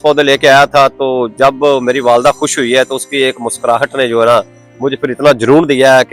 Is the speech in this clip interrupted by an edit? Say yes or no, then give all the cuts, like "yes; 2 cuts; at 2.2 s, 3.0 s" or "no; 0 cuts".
no; 0 cuts